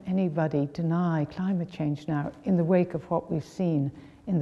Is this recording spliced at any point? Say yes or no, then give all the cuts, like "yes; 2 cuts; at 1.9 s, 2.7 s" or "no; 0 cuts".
no; 0 cuts